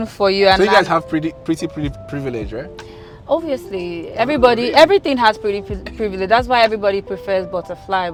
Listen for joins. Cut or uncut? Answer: uncut